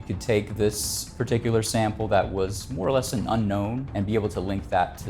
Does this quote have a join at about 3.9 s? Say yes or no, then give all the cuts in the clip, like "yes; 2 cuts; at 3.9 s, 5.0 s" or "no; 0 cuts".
yes; 1 cut; at 3.9 s